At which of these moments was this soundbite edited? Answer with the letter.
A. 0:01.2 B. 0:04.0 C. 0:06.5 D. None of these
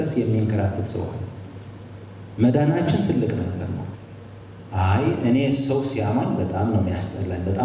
B